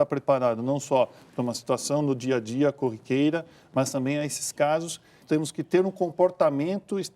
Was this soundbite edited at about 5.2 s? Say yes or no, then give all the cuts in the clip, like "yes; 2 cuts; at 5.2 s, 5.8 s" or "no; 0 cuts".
yes; 1 cut; at 5.2 s